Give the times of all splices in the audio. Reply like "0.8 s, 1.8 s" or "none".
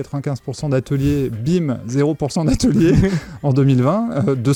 none